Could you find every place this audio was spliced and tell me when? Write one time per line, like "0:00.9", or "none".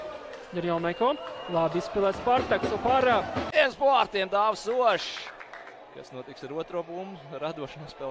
0:03.5